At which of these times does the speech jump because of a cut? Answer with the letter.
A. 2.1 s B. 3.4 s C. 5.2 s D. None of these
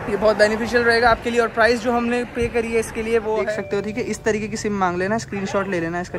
B